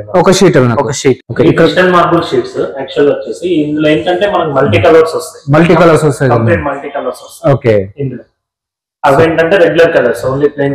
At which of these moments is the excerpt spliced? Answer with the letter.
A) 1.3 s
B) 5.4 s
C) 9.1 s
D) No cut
A